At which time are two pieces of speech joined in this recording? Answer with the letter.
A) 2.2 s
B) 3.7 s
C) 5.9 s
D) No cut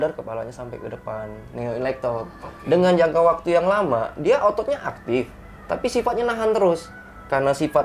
D